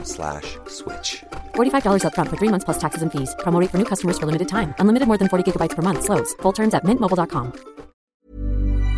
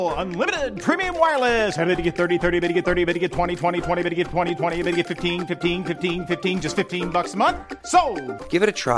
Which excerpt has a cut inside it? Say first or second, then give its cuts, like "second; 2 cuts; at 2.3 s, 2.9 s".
first; 1 cut; at 8.0 s